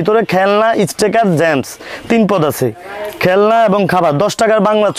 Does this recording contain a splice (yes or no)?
no